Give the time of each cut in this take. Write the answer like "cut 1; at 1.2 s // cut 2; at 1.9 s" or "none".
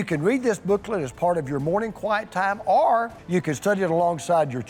none